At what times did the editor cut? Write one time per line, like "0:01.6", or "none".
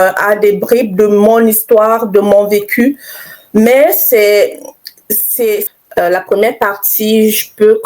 0:05.6

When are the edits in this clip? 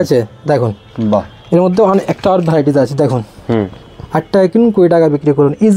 none

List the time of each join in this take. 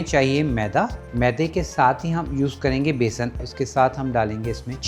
0:01.0
0:03.4

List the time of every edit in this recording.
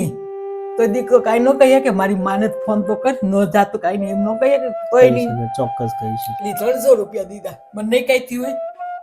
0:06.5

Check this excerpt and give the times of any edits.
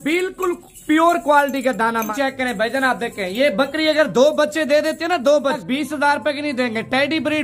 0:02.1
0:05.6

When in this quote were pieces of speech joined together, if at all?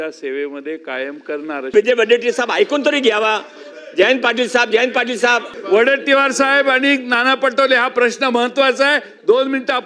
0:01.7
0:05.5

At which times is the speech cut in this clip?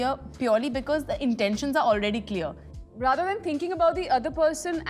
0:02.7

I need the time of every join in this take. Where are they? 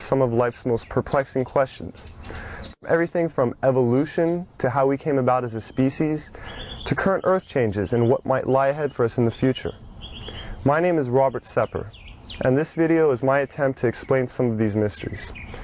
0:08.5

